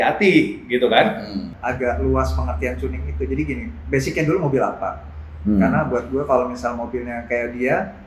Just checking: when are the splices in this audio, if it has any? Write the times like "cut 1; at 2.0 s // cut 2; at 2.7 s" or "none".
cut 1; at 1.5 s